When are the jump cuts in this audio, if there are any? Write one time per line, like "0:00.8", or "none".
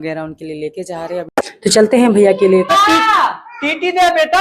0:01.3
0:02.7